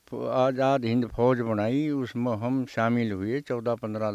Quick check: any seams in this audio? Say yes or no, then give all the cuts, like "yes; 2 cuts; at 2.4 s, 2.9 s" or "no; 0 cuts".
no; 0 cuts